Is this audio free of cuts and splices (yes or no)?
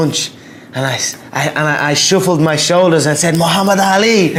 yes